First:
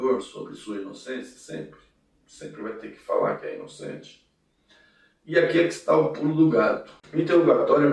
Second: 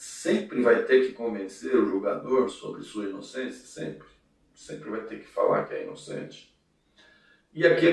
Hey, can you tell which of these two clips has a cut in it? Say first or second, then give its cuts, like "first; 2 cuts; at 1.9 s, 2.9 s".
first; 1 cut; at 6.9 s